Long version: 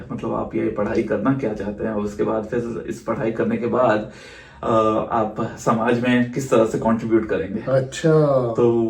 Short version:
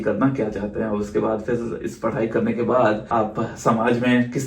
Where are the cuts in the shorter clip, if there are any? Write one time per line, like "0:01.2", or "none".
0:03.1